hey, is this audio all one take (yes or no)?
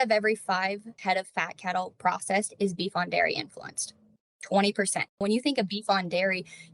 no